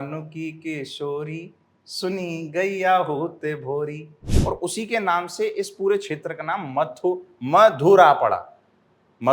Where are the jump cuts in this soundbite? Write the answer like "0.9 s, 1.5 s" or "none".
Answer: 4.2 s